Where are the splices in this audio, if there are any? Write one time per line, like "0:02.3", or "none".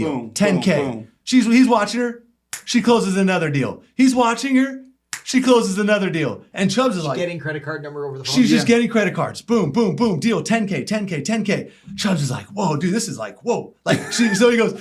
0:06.4